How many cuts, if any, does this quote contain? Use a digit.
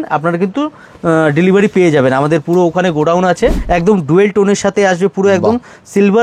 1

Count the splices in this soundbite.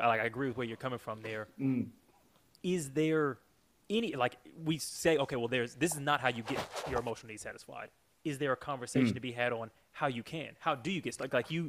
0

